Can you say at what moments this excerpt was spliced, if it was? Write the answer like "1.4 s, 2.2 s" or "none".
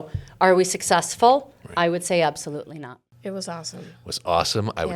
2.9 s

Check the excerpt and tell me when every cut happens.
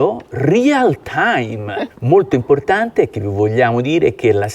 1.8 s

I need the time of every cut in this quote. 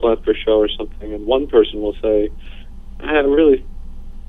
none

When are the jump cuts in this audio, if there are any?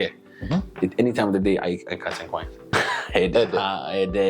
2.6 s

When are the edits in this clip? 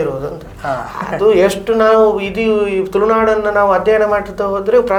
none

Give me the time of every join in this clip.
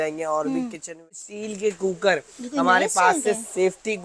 1.0 s

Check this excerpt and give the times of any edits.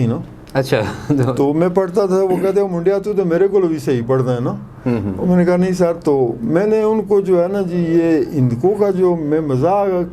none

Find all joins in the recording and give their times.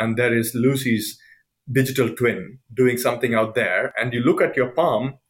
3.9 s

